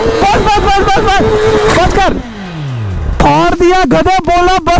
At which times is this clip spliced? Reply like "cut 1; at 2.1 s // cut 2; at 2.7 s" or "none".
none